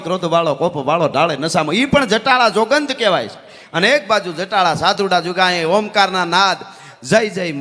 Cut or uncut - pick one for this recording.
uncut